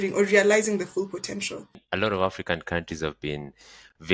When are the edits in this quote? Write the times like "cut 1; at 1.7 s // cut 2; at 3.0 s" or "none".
cut 1; at 1.8 s